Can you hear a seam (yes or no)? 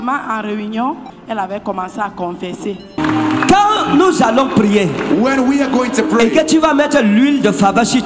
yes